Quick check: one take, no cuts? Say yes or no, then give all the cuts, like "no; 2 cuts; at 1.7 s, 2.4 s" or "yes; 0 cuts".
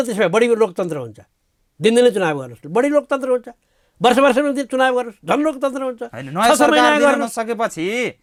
yes; 0 cuts